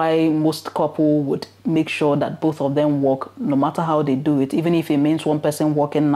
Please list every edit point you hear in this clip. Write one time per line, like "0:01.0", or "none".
none